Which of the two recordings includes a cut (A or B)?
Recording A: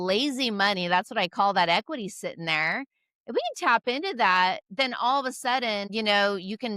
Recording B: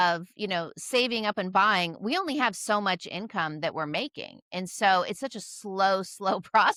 A